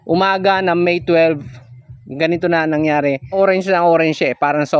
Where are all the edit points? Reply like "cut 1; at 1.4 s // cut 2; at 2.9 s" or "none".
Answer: cut 1; at 3.3 s

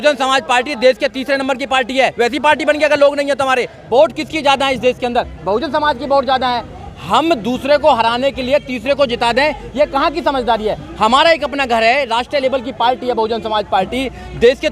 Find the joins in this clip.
cut 1; at 3.8 s

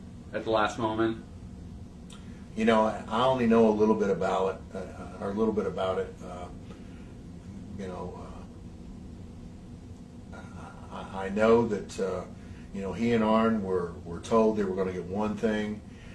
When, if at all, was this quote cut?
cut 1; at 6.8 s

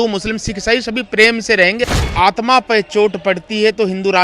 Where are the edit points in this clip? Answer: cut 1; at 1.9 s

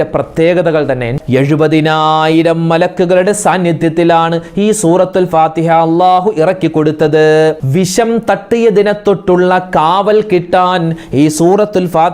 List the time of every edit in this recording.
cut 1; at 1.2 s // cut 2; at 7.6 s

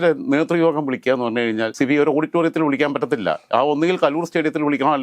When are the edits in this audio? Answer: cut 1; at 1.7 s

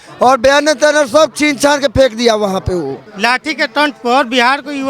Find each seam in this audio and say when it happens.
cut 1; at 3.0 s

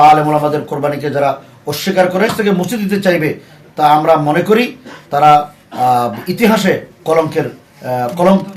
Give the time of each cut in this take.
cut 1; at 2.3 s

